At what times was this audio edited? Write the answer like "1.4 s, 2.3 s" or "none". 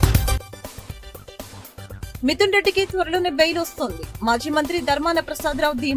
2.1 s